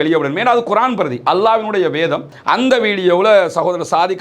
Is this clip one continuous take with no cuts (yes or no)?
no